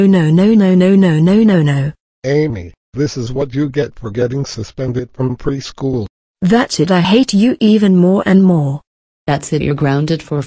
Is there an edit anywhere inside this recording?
yes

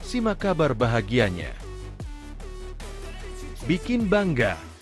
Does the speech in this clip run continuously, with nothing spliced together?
no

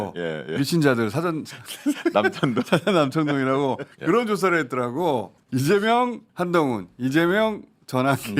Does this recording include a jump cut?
yes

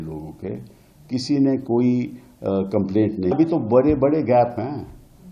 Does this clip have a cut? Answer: yes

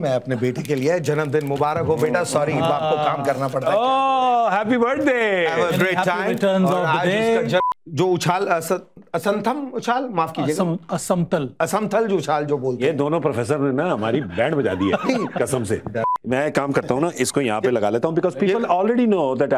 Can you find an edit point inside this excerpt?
yes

